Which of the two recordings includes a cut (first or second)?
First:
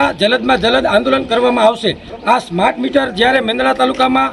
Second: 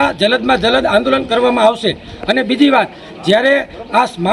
first